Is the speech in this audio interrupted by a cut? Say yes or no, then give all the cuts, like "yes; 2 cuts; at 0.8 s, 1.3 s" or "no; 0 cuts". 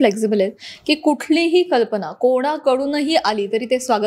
no; 0 cuts